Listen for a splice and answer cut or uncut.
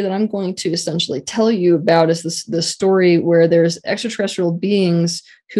uncut